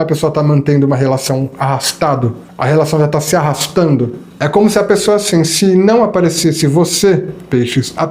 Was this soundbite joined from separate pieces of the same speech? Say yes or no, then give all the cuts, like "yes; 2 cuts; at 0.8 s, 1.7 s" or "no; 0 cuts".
yes; 2 cuts; at 2.4 s, 4.2 s